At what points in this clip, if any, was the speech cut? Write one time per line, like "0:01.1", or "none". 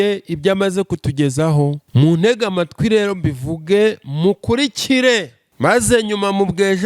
0:01.8
0:05.4